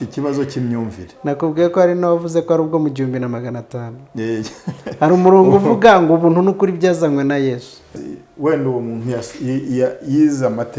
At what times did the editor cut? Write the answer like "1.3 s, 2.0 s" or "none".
7.9 s

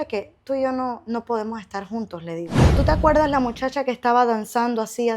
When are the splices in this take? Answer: 2.6 s

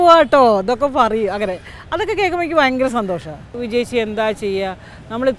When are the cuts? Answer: 3.6 s

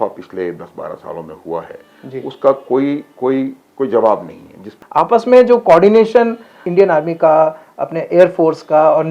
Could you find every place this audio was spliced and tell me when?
4.8 s, 6.6 s

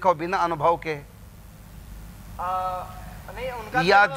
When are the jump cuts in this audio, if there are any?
none

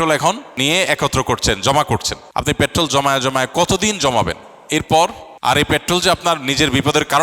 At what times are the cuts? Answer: 2.2 s

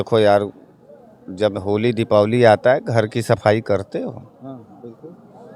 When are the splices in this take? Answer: none

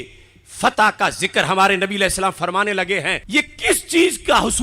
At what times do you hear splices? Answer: 3.2 s

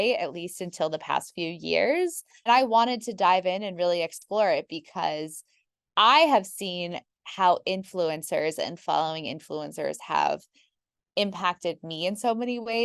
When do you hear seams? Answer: 2.5 s

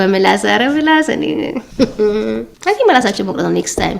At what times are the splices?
2.5 s

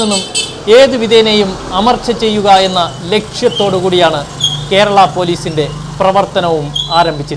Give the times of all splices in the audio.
none

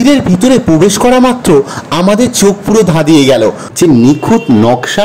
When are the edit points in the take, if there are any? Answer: 3.9 s

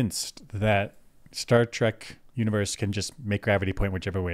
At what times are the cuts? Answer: none

